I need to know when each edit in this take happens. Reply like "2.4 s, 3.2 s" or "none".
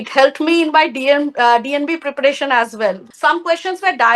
3.1 s